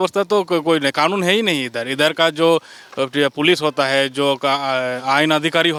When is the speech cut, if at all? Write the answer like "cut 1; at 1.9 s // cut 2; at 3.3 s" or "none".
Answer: none